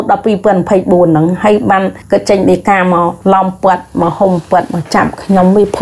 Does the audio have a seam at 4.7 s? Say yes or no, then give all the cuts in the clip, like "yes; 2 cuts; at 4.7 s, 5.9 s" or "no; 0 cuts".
no; 2 cuts; at 2.0 s, 3.2 s